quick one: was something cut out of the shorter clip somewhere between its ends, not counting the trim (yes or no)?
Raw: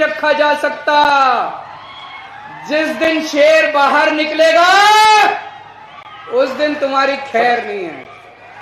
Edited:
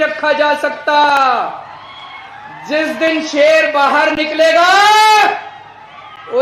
no